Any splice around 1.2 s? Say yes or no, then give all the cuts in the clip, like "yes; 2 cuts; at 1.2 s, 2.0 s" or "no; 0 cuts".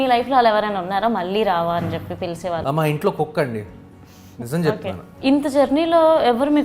no; 2 cuts; at 2.6 s, 5.1 s